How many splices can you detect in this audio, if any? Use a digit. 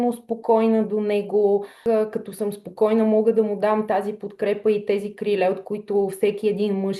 1